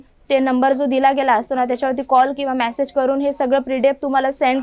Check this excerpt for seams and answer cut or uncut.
uncut